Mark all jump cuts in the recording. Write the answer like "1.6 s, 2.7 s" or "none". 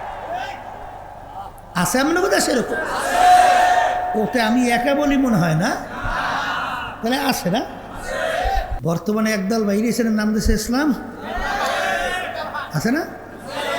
8.7 s